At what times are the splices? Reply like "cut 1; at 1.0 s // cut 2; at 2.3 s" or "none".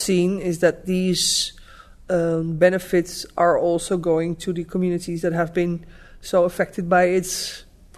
none